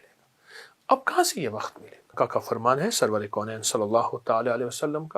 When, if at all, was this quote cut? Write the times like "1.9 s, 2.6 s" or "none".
2.2 s